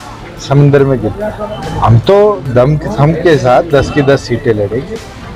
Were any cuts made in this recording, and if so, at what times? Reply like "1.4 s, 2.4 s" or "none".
1.6 s